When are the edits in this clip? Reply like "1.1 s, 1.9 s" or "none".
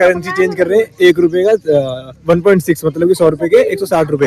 none